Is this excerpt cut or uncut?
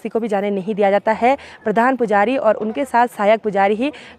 uncut